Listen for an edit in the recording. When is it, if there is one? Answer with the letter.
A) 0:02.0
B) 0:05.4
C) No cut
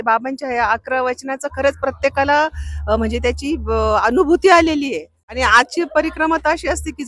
B